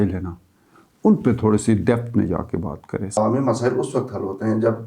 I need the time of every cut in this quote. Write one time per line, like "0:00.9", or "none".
0:03.2